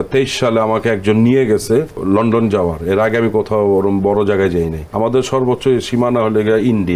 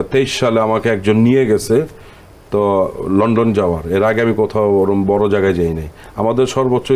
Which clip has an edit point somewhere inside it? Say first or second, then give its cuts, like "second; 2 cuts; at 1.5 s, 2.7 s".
first; 2 cuts; at 2.0 s, 4.8 s